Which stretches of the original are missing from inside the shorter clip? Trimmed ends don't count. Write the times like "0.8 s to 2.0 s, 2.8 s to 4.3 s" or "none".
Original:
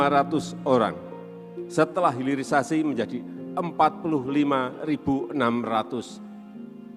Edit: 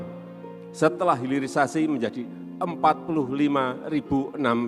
none